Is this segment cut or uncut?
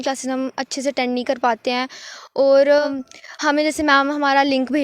cut